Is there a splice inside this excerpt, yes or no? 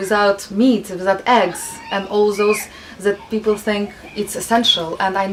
no